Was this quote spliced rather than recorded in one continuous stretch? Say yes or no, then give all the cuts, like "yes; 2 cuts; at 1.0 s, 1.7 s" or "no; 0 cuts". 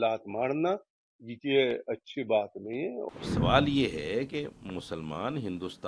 yes; 1 cut; at 3.1 s